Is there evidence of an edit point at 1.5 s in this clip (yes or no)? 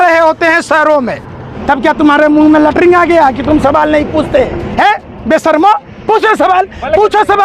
yes